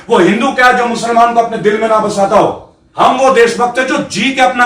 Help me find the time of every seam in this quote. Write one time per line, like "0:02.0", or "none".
0:02.8